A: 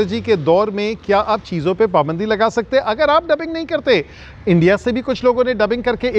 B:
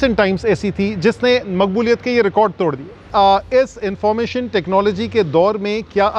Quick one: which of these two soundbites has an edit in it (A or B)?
B